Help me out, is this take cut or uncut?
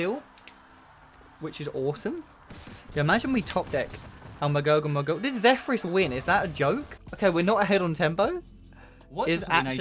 cut